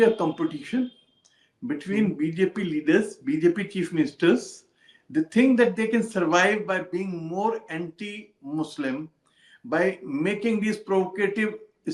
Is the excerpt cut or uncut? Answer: uncut